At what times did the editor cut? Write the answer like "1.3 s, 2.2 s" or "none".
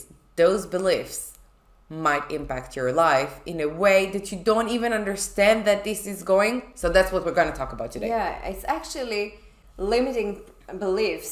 none